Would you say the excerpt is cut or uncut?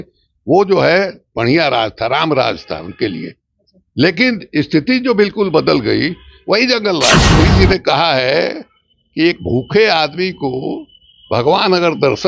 cut